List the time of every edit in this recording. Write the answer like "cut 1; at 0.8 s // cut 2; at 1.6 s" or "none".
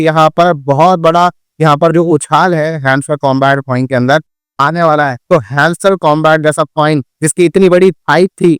cut 1; at 5.2 s